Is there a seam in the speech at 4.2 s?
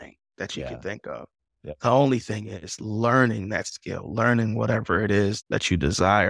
no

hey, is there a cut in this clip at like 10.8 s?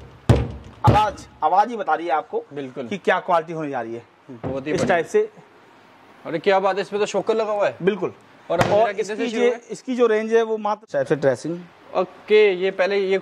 yes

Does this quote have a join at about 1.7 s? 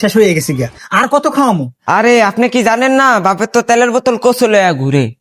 yes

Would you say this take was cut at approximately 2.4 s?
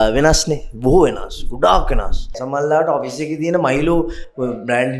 yes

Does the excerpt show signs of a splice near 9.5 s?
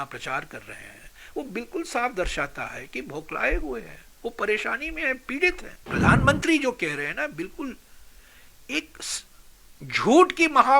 no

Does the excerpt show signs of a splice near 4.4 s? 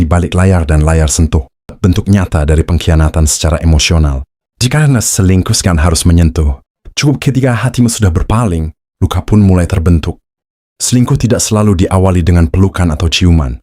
no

